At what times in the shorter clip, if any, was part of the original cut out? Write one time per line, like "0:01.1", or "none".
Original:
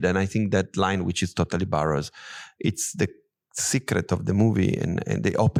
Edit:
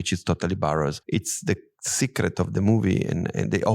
0:01.0
0:01.8